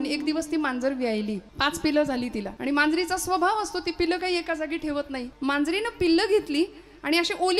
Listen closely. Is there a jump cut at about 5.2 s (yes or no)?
yes